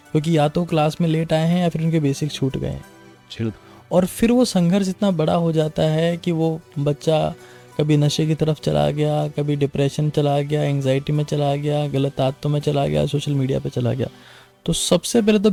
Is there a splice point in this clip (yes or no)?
no